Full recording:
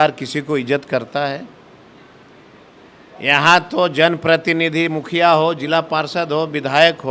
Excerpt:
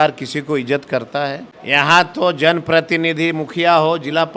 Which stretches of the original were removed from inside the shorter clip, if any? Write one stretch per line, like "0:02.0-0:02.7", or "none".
0:01.1-0:02.6